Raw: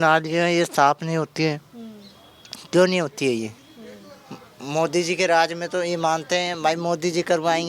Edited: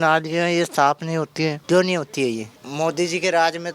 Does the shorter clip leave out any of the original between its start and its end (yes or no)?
yes